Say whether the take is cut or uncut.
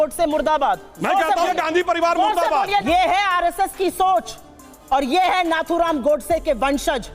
cut